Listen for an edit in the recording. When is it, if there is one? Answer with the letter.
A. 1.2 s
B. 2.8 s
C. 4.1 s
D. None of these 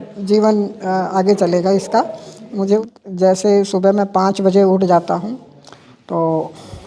B